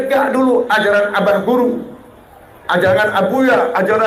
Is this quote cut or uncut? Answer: uncut